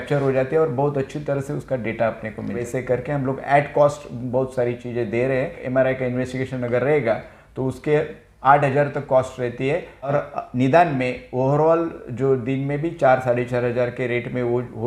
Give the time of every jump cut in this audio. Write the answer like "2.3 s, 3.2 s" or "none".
2.6 s, 5.6 s, 10.1 s

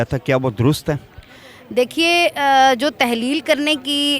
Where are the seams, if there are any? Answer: none

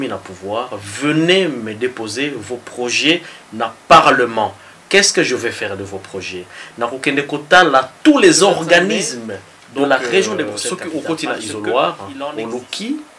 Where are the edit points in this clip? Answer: 10.6 s

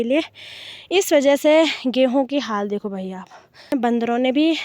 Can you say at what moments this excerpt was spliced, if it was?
3.7 s

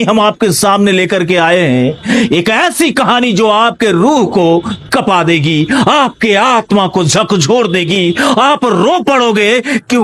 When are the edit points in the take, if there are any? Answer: none

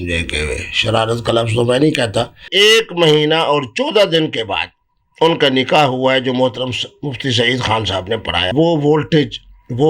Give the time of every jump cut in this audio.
2.5 s, 8.5 s

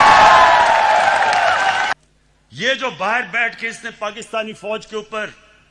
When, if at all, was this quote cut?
1.9 s

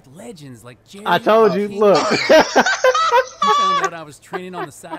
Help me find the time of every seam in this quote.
none

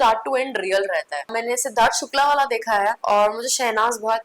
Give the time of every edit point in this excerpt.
1.4 s, 3.0 s

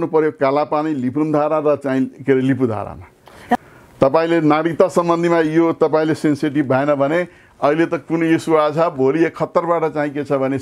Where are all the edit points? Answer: 3.5 s

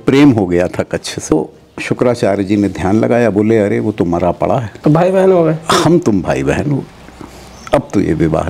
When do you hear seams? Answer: 1.3 s, 4.7 s

